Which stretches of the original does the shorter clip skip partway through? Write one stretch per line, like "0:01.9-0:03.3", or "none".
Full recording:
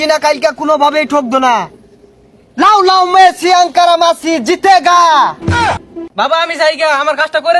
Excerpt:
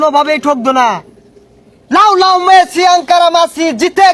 none